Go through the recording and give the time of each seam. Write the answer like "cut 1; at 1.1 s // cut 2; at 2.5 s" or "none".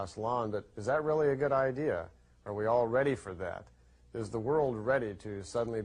cut 1; at 4.6 s